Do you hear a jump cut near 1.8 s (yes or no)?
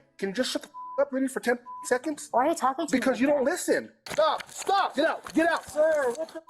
no